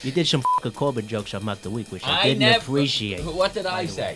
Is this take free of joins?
yes; 0 cuts

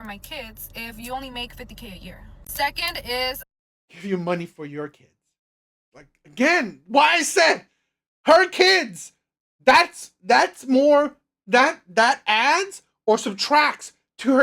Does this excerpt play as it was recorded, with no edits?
yes; 0 cuts

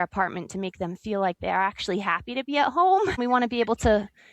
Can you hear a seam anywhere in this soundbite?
yes; 1 cut; at 3.2 s

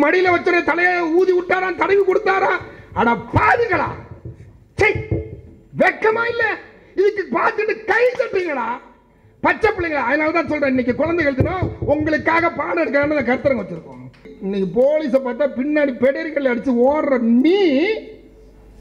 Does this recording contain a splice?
yes; 1 cut; at 14.3 s

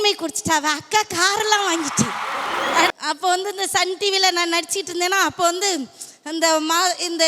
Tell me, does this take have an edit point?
yes; 1 cut; at 2.9 s

